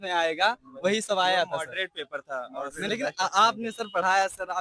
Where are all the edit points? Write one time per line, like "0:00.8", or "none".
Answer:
0:02.9